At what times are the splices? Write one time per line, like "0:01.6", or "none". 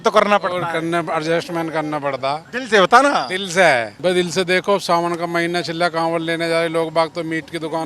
0:02.5
0:03.9